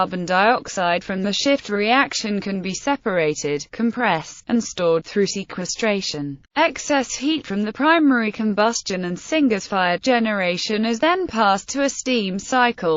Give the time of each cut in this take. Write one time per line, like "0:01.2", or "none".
0:03.2